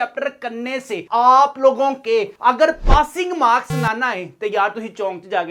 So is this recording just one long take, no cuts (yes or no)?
yes